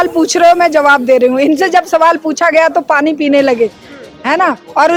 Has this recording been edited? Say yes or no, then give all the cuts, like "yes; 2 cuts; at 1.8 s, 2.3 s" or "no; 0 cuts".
no; 0 cuts